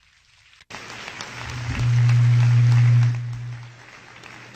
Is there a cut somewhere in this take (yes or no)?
yes